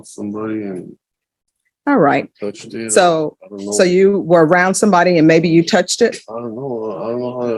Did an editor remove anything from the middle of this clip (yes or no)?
no